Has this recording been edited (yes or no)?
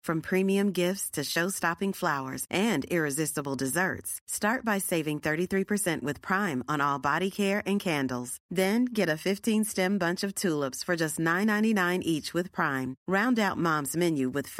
no